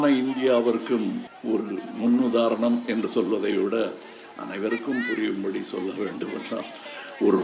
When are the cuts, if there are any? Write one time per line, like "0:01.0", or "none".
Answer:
0:01.3